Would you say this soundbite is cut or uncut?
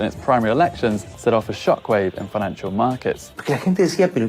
cut